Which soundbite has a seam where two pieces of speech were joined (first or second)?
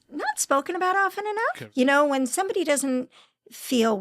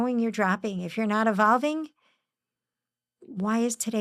first